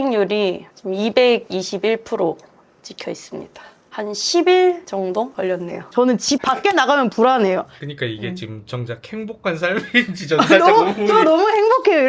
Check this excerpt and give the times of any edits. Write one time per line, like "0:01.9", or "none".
0:03.9
0:05.9